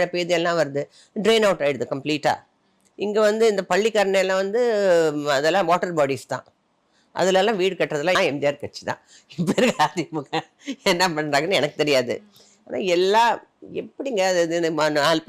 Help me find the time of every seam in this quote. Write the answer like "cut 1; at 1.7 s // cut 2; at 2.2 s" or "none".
cut 1; at 8.2 s